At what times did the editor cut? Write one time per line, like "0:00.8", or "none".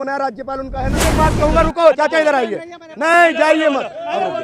0:01.1